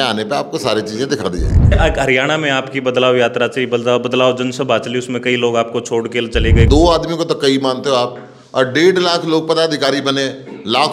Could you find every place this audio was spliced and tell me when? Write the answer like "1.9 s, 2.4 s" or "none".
1.7 s, 6.7 s